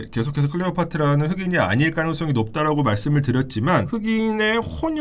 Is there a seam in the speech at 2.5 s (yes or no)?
no